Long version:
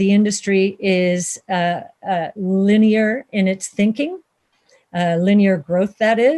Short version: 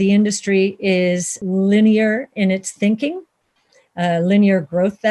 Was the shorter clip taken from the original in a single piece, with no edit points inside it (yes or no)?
no